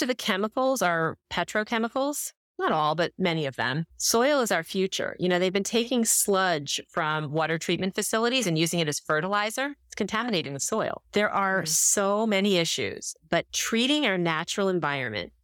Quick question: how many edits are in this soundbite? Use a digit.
1